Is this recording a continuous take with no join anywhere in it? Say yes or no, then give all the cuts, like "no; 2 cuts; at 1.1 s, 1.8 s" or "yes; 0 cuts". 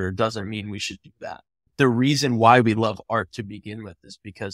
no; 1 cut; at 1.7 s